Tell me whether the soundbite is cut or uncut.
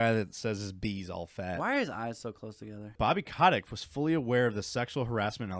cut